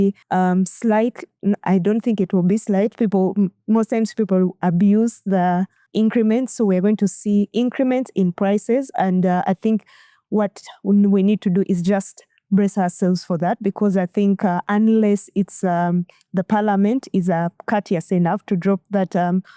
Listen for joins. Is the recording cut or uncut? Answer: uncut